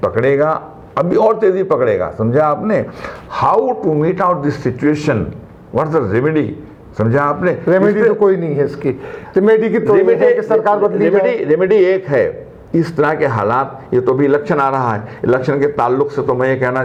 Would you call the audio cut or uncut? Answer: uncut